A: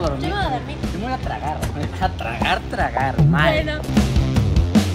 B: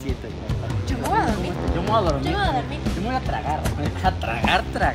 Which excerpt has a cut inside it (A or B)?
A